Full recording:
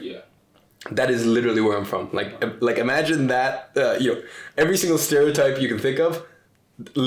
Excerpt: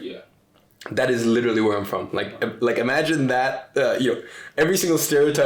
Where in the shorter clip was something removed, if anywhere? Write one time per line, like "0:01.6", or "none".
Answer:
none